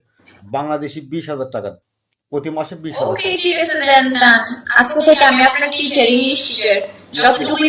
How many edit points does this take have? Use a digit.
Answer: 1